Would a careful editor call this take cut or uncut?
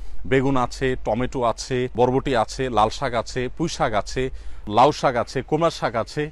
cut